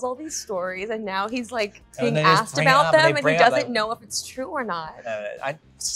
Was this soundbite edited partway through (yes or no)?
no